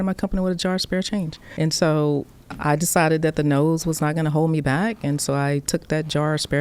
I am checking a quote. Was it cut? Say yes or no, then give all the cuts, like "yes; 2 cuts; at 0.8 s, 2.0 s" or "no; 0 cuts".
no; 0 cuts